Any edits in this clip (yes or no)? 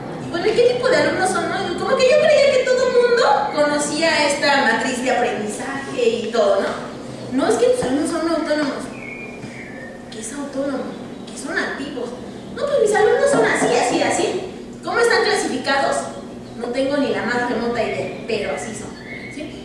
yes